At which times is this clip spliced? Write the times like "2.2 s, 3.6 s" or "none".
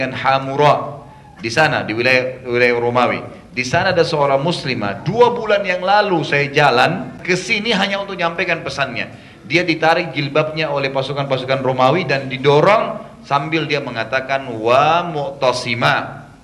7.2 s